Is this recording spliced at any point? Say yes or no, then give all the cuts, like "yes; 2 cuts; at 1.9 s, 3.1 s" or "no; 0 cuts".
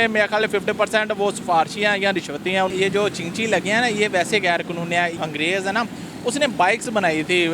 yes; 2 cuts; at 2.7 s, 5.2 s